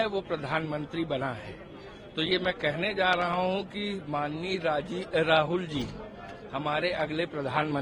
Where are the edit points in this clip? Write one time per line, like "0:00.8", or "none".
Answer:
none